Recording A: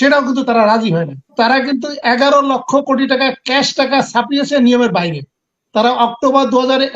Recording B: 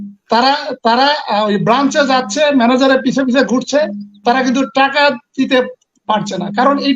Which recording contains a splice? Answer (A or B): A